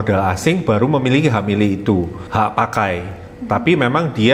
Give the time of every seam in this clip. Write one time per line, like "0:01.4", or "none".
0:02.2